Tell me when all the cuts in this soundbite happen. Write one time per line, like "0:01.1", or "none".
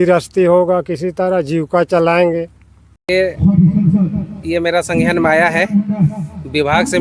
0:03.0